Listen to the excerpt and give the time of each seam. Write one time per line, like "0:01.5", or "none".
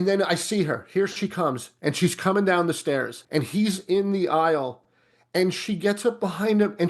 0:03.2